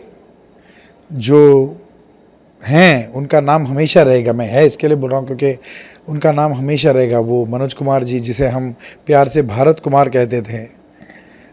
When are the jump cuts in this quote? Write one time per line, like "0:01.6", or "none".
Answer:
none